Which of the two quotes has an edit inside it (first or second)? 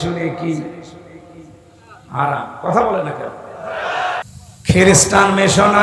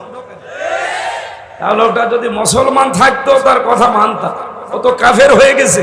first